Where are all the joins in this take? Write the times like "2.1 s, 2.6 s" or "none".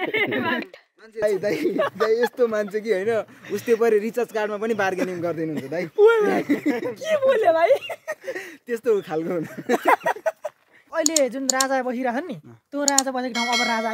1.2 s, 10.8 s